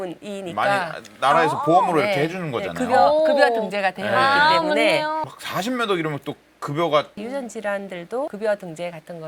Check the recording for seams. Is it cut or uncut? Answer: uncut